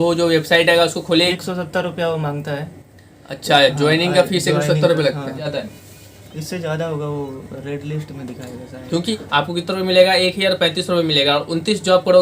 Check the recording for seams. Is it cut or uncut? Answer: cut